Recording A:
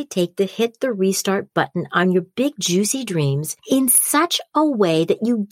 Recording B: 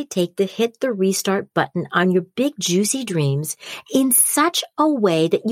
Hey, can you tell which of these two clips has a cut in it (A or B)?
A